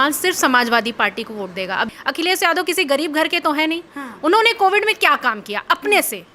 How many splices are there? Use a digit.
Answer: 1